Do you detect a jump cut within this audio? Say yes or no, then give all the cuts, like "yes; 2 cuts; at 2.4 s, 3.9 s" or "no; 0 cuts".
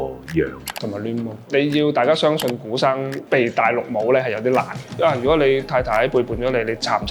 yes; 3 cuts; at 1.5 s, 3.2 s, 5.0 s